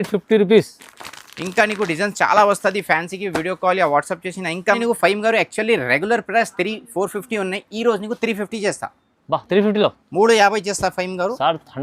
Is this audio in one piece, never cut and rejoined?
no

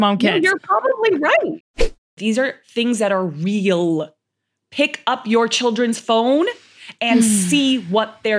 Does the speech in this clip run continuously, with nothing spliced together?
no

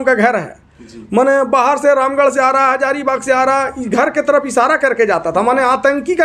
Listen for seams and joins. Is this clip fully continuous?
yes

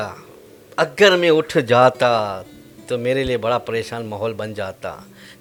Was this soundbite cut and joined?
no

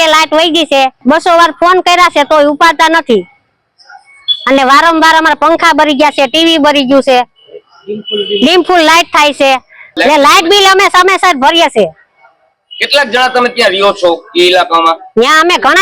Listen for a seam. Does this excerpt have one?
no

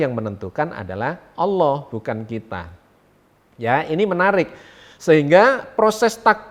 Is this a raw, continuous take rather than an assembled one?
yes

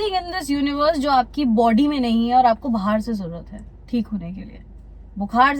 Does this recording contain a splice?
no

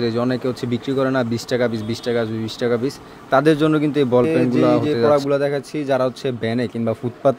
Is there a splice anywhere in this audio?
yes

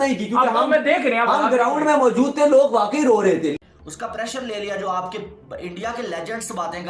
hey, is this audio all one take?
no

